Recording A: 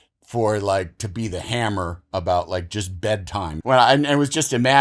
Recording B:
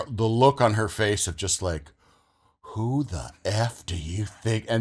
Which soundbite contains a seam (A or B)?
A